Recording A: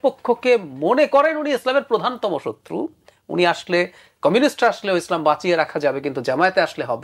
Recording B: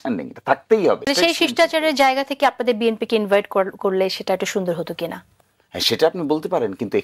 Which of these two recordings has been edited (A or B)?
B